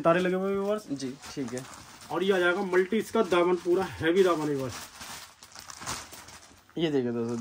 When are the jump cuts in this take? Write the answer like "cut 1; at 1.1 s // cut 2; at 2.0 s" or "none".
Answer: none